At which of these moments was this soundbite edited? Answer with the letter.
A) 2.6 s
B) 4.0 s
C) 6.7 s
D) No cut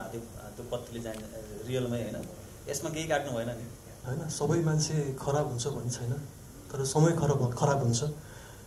B